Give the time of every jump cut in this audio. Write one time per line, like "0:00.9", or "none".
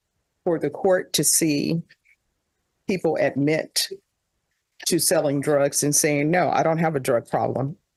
none